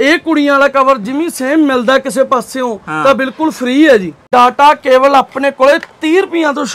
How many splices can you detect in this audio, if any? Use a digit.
1